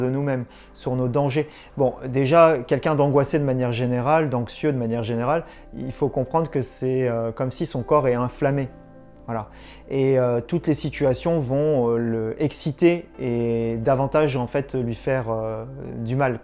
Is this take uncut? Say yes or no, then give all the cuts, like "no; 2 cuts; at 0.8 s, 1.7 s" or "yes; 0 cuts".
yes; 0 cuts